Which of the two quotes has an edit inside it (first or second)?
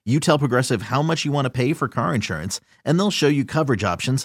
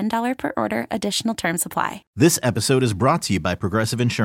second